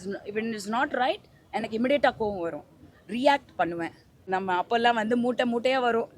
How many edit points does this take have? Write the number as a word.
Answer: one